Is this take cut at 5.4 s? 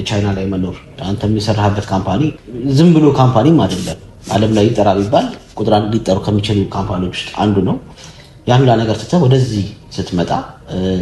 no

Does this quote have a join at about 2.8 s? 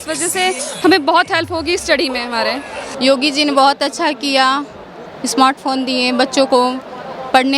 yes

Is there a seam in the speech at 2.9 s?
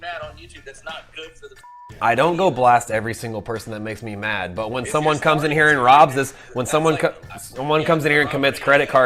no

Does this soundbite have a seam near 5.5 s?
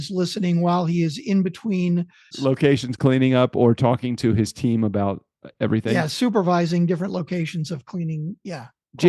no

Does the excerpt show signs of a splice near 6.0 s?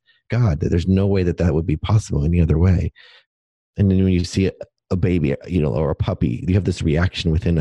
no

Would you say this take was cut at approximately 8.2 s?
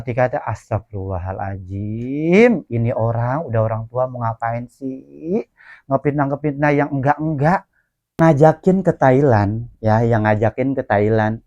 yes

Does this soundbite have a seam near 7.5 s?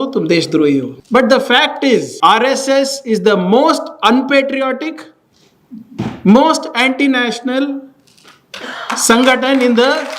no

